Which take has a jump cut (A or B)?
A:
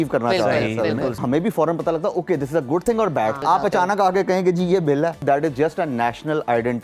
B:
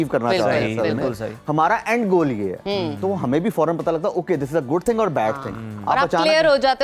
A